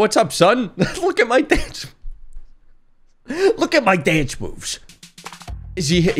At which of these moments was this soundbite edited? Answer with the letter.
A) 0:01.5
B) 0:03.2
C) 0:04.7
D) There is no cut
C